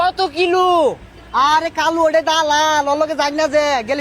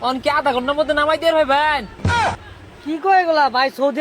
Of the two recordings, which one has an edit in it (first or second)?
second